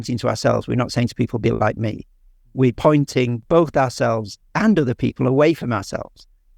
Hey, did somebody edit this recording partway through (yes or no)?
yes